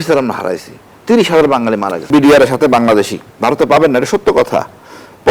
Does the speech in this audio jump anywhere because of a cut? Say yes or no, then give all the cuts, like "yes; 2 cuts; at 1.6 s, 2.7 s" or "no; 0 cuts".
yes; 2 cuts; at 2.1 s, 3.2 s